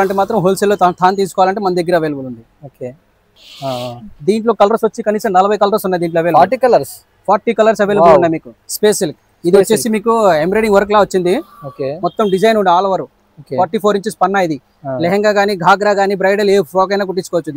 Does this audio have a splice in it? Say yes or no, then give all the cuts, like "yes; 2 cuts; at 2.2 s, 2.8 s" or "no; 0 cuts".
no; 0 cuts